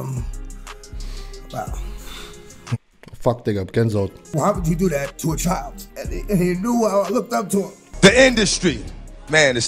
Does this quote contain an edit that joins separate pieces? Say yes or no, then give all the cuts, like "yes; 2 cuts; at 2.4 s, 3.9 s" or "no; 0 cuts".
yes; 2 cuts; at 4.2 s, 7.8 s